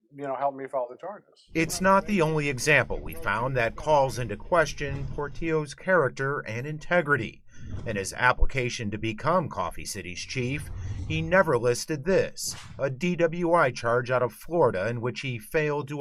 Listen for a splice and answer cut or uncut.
uncut